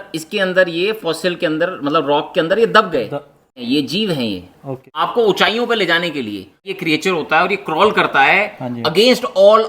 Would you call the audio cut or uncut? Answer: cut